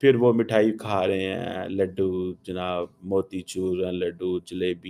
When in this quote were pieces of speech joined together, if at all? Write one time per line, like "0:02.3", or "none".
none